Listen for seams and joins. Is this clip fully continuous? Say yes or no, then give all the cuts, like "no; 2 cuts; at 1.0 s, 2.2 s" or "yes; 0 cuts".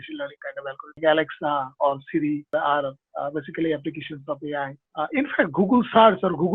no; 3 cuts; at 1.0 s, 2.5 s, 4.8 s